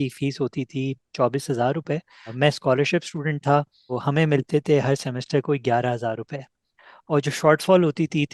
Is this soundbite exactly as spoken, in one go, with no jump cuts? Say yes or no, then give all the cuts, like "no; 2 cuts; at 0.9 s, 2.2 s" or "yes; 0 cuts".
no; 2 cuts; at 2.3 s, 4.0 s